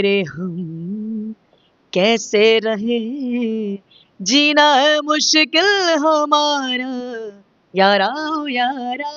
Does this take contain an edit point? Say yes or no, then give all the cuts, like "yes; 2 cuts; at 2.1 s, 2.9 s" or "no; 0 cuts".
no; 0 cuts